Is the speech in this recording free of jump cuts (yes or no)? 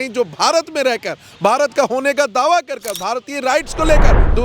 yes